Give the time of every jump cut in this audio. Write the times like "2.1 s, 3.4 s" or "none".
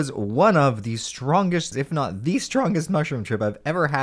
1.7 s